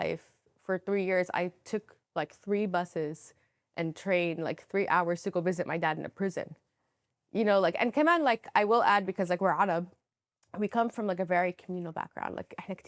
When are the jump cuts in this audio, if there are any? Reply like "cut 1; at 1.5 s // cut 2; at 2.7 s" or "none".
none

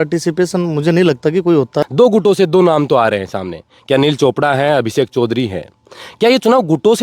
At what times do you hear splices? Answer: cut 1; at 1.8 s

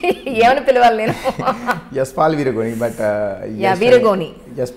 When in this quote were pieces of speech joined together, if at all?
none

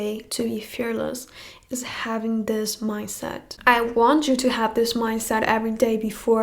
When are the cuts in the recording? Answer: none

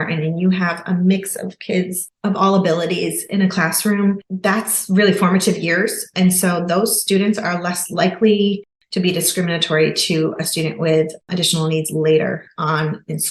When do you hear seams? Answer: none

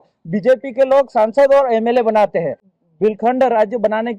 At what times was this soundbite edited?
cut 1; at 2.7 s

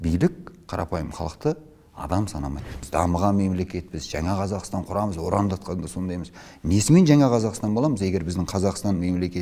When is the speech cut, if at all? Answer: cut 1; at 2.8 s

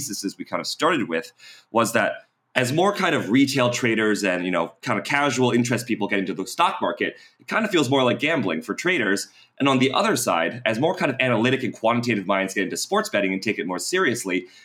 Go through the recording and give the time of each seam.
none

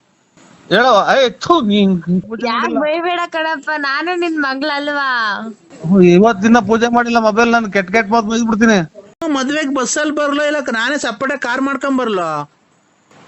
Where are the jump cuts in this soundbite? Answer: cut 1; at 2.3 s // cut 2; at 9.0 s

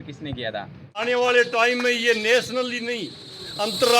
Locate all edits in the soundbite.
cut 1; at 0.9 s

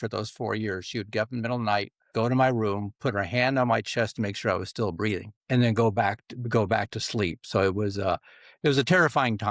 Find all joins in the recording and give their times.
none

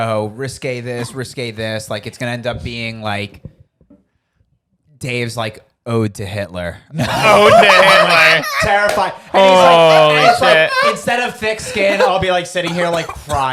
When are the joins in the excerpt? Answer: none

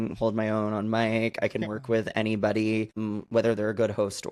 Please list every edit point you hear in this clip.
cut 1; at 3.0 s

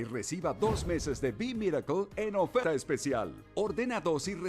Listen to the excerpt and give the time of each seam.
cut 1; at 2.6 s

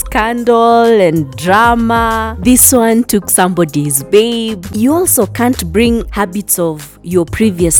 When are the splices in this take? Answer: cut 1; at 4.7 s

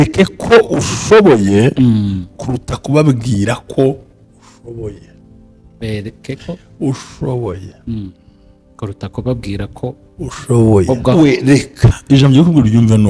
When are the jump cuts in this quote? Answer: cut 1; at 11.1 s

